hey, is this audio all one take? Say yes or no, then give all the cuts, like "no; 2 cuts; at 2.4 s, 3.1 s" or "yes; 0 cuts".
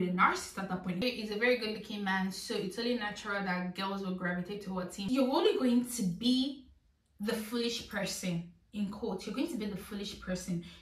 no; 2 cuts; at 1.0 s, 5.0 s